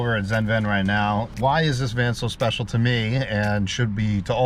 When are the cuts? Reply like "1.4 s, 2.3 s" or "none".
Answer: 1.3 s

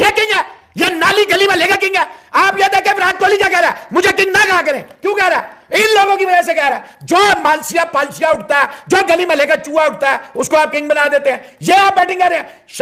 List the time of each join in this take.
none

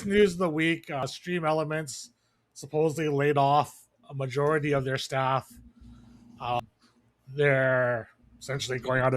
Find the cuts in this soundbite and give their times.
1.0 s, 6.6 s

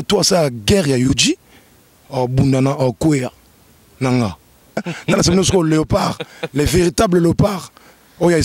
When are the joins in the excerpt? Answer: 4.8 s

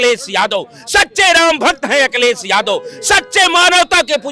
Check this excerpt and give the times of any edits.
none

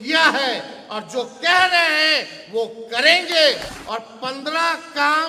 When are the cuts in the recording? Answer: 3.7 s

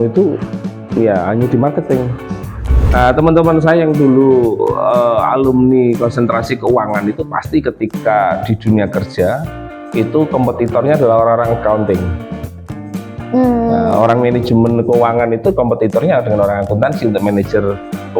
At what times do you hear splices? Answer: 2.9 s

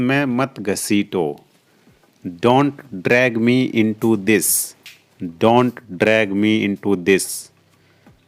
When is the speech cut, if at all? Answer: none

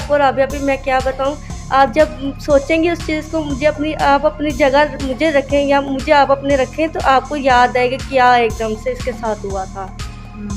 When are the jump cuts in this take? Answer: none

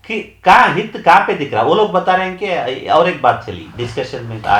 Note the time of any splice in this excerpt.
none

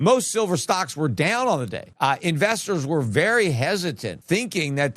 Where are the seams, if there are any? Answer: 1.9 s

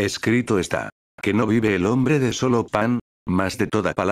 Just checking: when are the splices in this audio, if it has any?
none

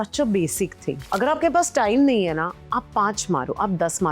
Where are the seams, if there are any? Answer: 1.0 s

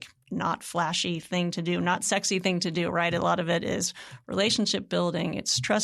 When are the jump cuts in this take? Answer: none

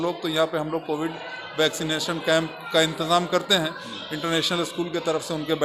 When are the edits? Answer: none

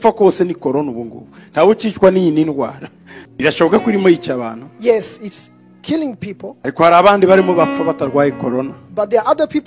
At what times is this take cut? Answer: 3.2 s

